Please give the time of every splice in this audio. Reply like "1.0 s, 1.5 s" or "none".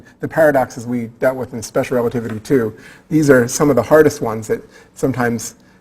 3.5 s